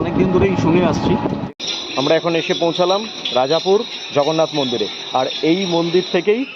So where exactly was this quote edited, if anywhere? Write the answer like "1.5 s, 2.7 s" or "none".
1.4 s